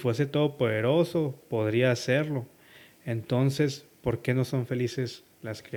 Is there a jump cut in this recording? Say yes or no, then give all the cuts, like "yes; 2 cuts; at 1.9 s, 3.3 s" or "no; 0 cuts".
no; 0 cuts